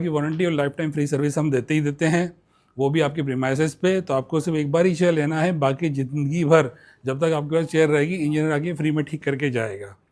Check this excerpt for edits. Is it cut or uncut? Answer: uncut